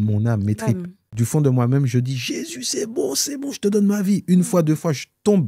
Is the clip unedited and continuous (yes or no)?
no